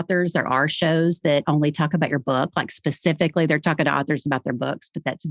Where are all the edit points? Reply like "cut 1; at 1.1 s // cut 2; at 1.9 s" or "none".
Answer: cut 1; at 1.4 s